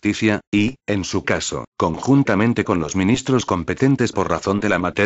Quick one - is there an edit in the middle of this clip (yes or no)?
no